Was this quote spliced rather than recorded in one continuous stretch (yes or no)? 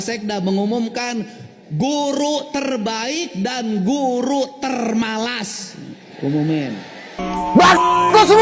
yes